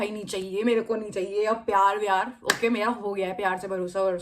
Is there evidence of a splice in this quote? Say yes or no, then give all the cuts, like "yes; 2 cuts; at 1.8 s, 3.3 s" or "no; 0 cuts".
no; 0 cuts